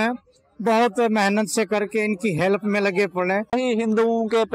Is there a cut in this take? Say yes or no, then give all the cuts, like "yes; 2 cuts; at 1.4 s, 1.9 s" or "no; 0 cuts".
yes; 1 cut; at 3.5 s